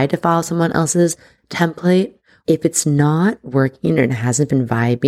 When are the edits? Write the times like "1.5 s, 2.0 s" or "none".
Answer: 2.2 s